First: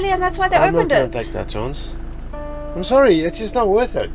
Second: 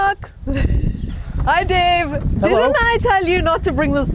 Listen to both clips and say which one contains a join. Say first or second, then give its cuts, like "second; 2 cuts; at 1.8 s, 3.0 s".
second; 1 cut; at 1.0 s